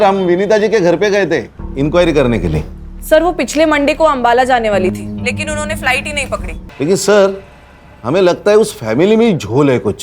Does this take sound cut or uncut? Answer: cut